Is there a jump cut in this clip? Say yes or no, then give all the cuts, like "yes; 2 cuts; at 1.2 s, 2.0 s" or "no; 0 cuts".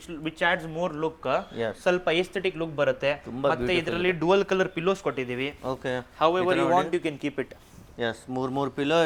no; 0 cuts